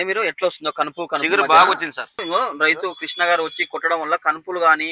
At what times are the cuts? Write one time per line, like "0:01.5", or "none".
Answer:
0:02.2